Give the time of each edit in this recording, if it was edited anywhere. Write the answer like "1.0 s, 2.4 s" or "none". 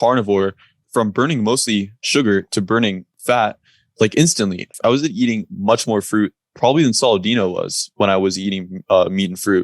0.8 s, 2.0 s, 3.1 s, 4.7 s